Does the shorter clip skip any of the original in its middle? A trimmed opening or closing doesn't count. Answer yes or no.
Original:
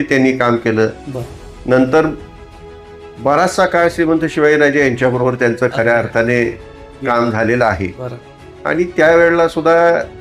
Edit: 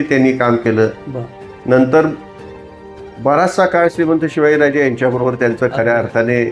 no